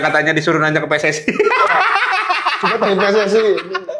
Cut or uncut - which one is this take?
uncut